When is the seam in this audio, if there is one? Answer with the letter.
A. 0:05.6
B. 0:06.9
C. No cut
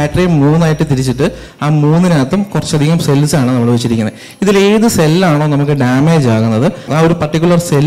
B